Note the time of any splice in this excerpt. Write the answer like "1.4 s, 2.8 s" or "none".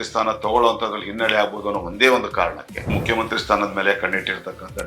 2.9 s